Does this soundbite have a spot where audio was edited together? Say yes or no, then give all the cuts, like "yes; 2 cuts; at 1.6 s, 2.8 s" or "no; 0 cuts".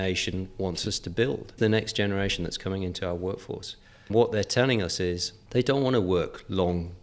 yes; 3 cuts; at 1.6 s, 4.1 s, 5.3 s